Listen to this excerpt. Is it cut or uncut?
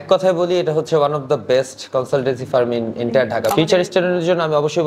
cut